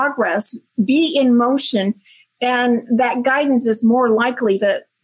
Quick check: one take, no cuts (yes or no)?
yes